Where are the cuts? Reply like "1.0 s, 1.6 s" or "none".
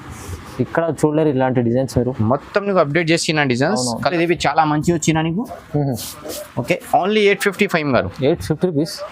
4.1 s